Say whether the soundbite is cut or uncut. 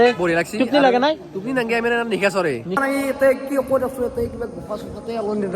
cut